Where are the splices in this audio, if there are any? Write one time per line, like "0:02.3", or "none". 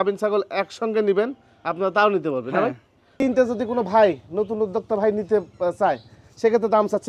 0:03.2

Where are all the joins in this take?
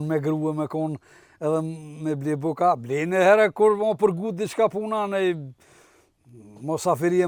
none

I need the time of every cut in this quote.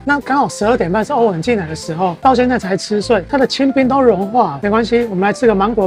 none

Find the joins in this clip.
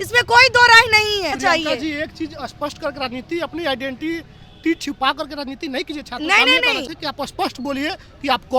0:01.4
0:06.9

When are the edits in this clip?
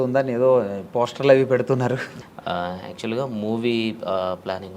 0:02.2

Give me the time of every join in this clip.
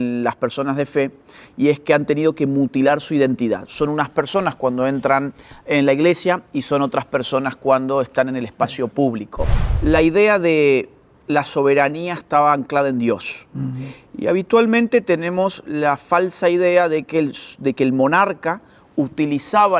0:09.6

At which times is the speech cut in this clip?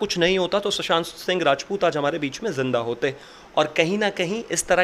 none

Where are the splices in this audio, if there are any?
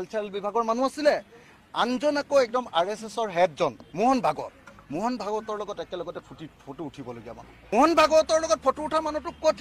0:03.8
0:07.7

